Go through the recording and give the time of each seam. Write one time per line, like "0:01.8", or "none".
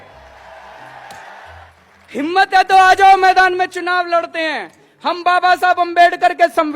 0:01.7

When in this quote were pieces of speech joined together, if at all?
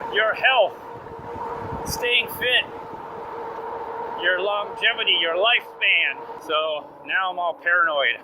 0:06.4

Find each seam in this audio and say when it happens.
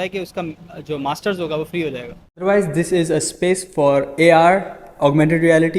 0:02.4

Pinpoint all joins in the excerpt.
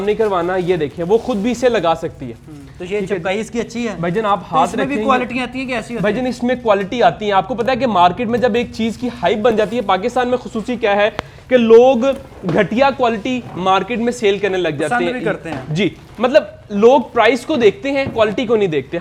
none

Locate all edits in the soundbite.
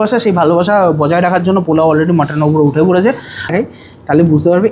0:03.5

